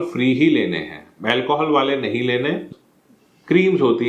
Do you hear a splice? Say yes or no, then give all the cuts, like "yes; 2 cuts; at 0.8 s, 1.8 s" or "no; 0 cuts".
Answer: yes; 1 cut; at 2.7 s